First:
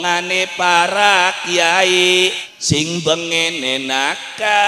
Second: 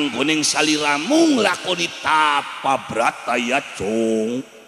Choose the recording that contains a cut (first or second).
first